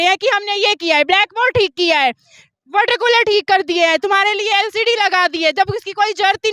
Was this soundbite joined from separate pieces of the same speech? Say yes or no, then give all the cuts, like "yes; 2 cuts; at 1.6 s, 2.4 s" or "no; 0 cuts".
no; 0 cuts